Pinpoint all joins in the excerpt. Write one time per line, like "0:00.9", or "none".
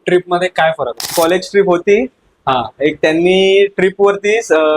0:01.0